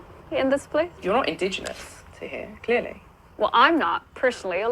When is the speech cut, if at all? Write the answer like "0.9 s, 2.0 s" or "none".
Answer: 0.9 s